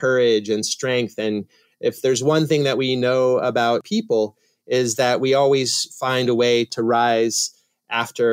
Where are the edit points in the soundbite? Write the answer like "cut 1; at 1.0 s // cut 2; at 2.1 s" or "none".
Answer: cut 1; at 3.8 s // cut 2; at 6.7 s